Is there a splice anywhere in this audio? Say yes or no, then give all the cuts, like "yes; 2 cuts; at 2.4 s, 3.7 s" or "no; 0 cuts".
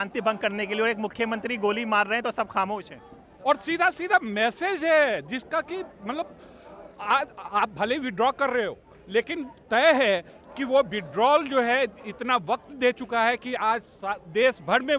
no; 0 cuts